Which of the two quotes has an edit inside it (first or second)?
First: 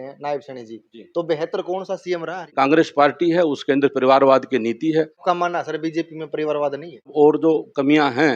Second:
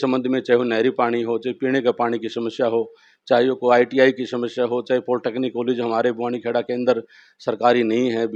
first